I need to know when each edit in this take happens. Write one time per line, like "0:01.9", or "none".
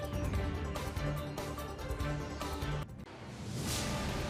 0:02.7